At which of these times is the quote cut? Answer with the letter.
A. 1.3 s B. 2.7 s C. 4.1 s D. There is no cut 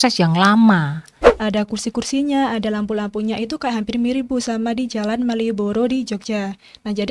A